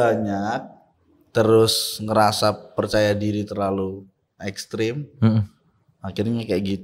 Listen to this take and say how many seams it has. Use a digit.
0